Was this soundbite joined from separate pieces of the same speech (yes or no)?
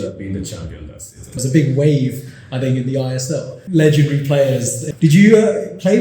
yes